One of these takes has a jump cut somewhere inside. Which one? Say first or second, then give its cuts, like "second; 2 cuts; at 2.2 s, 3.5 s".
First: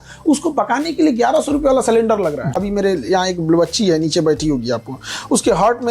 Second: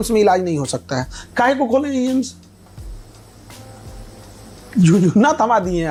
first; 1 cut; at 2.6 s